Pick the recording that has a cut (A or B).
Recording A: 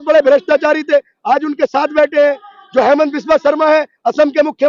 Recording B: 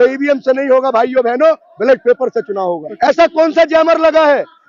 B